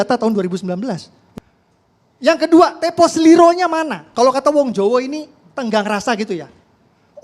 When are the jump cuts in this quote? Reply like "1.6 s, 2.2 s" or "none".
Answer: 1.2 s